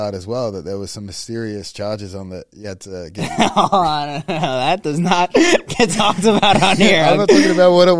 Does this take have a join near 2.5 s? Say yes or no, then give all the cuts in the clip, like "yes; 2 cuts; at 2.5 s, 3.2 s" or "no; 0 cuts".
no; 0 cuts